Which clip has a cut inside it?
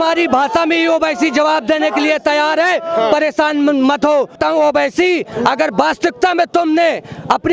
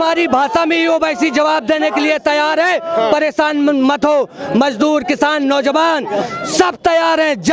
first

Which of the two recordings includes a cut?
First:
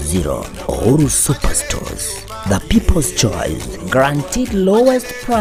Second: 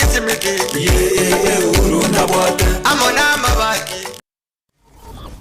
second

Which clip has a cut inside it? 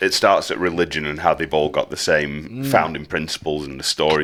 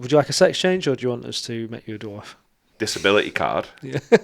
second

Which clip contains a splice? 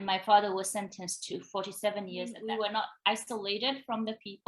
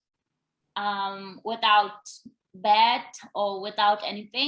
first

